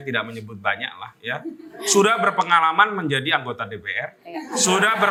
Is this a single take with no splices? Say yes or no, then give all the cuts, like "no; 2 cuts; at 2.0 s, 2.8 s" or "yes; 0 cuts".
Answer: yes; 0 cuts